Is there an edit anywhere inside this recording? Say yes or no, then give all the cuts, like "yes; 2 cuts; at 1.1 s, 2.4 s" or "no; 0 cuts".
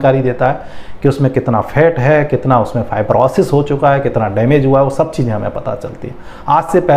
no; 0 cuts